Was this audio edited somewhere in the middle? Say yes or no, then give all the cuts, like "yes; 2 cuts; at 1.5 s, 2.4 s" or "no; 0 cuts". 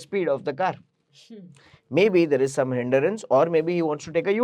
no; 0 cuts